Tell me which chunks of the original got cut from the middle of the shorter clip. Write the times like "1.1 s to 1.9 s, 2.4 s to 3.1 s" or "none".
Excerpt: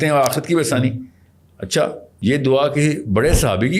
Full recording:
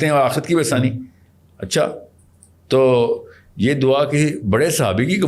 2.1 s to 3.4 s